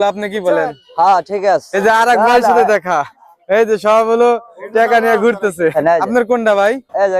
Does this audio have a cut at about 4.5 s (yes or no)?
no